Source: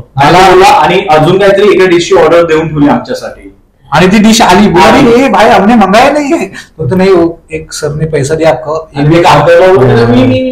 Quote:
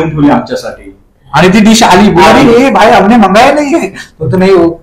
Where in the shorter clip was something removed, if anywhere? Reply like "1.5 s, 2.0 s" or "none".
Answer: none